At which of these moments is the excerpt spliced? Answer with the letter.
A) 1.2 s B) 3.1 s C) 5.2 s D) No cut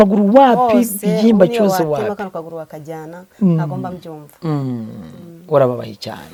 D